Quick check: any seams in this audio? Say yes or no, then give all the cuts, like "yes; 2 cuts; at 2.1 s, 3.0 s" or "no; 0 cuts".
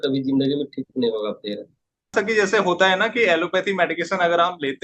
yes; 1 cut; at 2.1 s